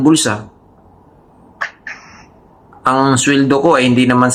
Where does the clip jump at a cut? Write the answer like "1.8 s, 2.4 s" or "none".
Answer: none